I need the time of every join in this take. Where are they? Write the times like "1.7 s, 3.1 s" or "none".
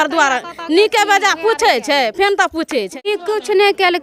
2.9 s